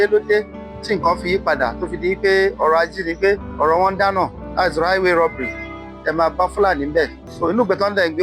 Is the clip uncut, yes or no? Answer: no